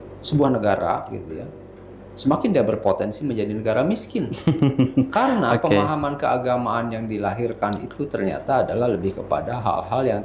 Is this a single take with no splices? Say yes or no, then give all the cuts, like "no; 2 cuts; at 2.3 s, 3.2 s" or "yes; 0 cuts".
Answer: yes; 0 cuts